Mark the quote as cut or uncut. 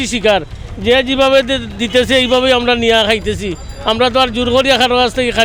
uncut